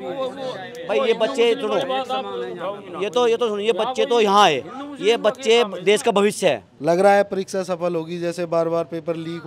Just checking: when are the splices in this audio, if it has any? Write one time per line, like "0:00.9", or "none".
0:06.7